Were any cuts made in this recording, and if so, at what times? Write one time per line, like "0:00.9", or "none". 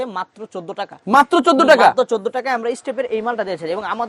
none